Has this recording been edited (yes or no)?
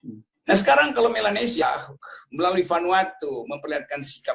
yes